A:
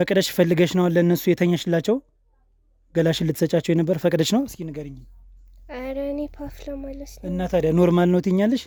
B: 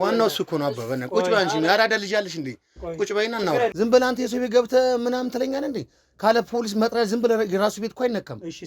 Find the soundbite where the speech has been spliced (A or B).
B